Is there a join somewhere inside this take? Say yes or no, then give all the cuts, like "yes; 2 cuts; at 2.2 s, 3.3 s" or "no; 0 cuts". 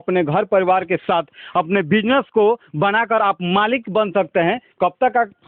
no; 0 cuts